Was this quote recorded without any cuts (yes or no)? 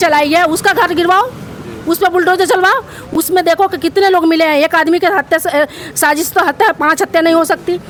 yes